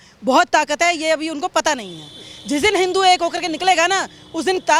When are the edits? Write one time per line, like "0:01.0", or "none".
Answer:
none